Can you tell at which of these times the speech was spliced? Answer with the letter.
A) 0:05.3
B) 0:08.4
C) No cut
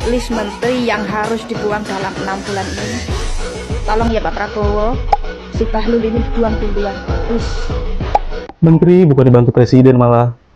B